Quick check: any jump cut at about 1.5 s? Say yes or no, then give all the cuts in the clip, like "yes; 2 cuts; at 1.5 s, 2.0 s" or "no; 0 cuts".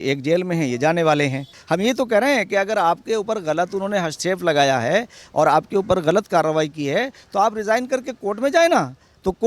yes; 1 cut; at 1.5 s